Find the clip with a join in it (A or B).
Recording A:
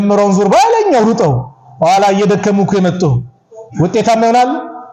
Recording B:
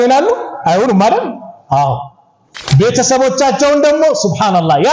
B